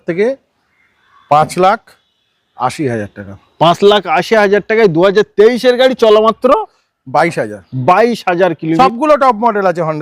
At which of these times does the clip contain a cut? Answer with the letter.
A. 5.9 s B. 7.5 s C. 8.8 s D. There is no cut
C